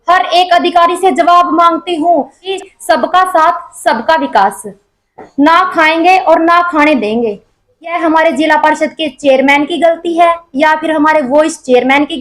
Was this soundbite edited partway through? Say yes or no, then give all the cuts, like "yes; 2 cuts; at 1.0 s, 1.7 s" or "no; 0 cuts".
yes; 2 cuts; at 2.5 s, 7.9 s